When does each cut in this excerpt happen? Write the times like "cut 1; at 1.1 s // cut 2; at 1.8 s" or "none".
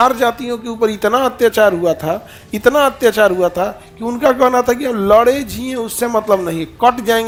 none